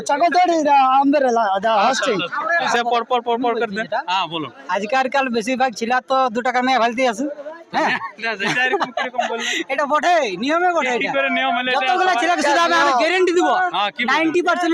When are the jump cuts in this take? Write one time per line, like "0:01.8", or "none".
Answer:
0:02.7